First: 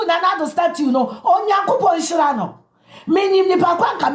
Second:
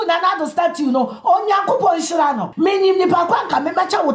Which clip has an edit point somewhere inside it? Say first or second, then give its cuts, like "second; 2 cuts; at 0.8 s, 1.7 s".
second; 1 cut; at 2.5 s